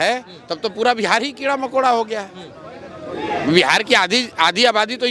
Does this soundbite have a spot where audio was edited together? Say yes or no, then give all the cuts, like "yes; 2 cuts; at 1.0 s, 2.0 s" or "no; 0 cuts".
no; 0 cuts